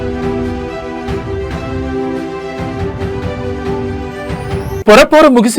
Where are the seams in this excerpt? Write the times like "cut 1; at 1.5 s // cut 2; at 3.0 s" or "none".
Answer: cut 1; at 4.3 s